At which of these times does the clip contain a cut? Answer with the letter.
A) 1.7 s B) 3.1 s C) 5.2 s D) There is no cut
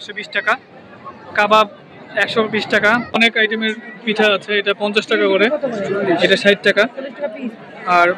B